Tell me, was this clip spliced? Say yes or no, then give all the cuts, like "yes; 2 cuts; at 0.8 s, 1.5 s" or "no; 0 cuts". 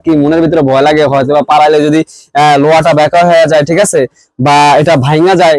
no; 0 cuts